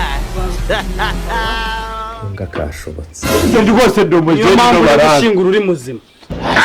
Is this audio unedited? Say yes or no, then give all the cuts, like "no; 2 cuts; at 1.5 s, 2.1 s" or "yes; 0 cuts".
no; 1 cut; at 3.2 s